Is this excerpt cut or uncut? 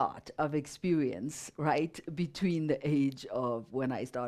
uncut